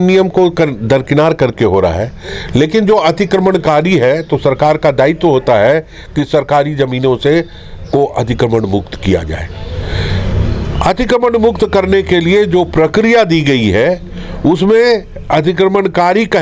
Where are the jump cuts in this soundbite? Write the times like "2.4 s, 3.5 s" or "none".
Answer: none